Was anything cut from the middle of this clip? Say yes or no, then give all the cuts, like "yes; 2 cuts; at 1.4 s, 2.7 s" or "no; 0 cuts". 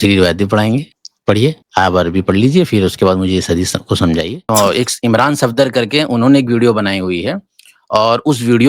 yes; 1 cut; at 4.4 s